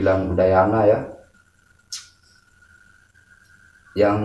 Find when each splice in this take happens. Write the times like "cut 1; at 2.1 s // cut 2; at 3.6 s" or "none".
none